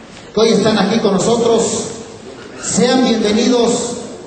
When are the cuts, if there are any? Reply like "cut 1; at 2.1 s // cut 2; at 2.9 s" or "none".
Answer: cut 1; at 1.5 s